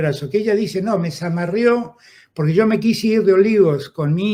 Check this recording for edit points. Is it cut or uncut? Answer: uncut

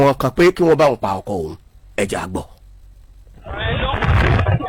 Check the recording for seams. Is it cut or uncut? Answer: uncut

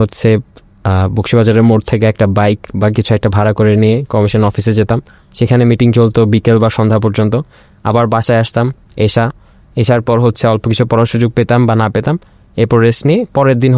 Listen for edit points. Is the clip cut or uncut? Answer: uncut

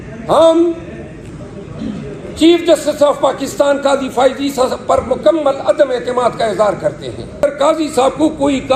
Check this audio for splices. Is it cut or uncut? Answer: cut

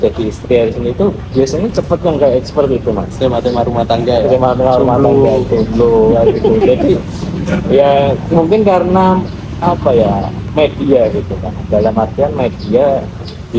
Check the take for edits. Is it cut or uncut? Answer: uncut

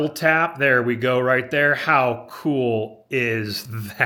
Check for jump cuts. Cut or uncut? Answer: uncut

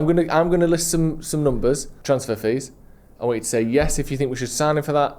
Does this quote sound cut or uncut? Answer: cut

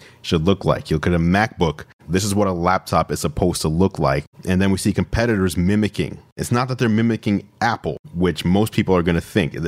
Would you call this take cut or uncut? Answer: cut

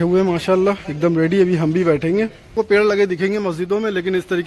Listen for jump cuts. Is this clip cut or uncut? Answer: cut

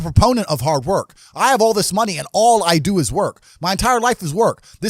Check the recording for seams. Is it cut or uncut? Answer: uncut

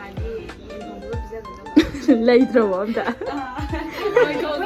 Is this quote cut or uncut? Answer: uncut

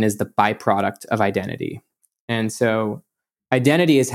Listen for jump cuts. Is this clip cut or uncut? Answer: uncut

